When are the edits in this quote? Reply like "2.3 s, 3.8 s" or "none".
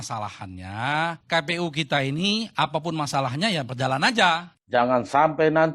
4.5 s